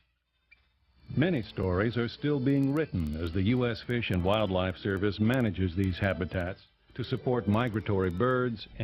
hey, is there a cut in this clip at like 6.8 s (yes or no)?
yes